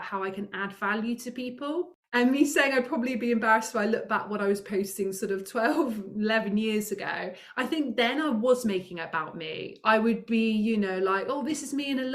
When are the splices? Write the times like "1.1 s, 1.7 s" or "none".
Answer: 2.0 s